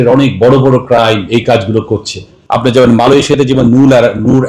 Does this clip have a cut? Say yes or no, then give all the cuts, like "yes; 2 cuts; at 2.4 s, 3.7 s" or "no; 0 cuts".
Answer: yes; 1 cut; at 2.4 s